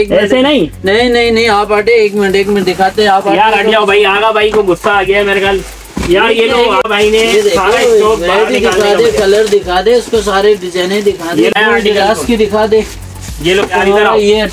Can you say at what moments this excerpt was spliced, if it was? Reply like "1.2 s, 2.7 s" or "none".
6.9 s, 11.5 s